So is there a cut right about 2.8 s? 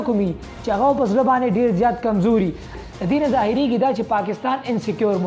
yes; 1 cut; at 2.8 s

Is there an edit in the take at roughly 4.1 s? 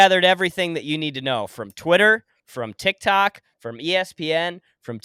no; 0 cuts

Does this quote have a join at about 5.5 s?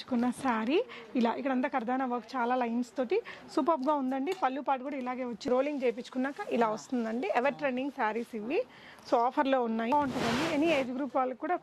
yes; 2 cuts; at 5.5 s, 9.9 s

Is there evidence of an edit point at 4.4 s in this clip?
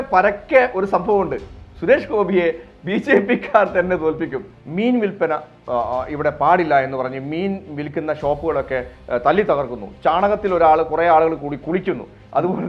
yes; 1 cut; at 4.4 s

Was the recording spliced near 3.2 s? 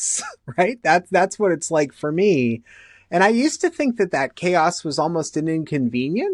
no; 0 cuts

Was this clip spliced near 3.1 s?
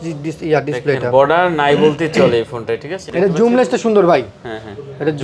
yes; 1 cut; at 3.1 s

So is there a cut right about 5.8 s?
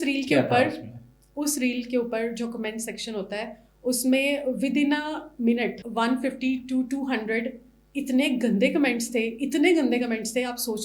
yes; 1 cut; at 5.8 s

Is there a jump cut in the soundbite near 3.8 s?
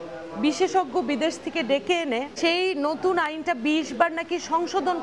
no; 1 cut; at 2.3 s

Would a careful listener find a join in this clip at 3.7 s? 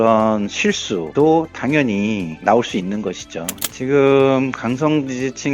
yes; 1 cut; at 3.7 s

